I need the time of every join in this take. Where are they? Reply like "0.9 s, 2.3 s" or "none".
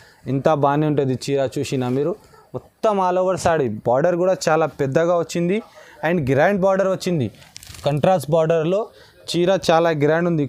none